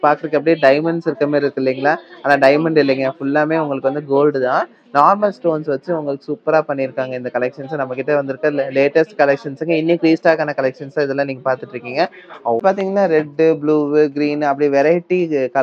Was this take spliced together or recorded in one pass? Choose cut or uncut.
cut